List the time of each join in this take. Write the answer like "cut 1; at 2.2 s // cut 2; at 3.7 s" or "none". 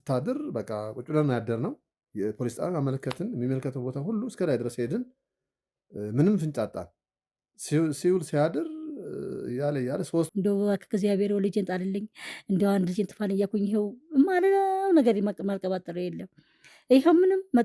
cut 1; at 10.3 s